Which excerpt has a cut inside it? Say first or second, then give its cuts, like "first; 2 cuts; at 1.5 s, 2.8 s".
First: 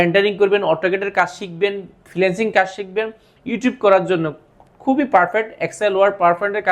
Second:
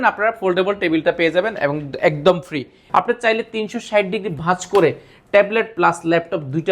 second; 1 cut; at 2.7 s